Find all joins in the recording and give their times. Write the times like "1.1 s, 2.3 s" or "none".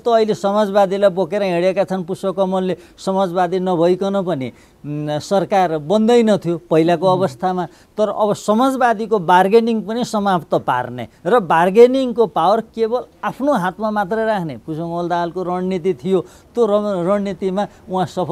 none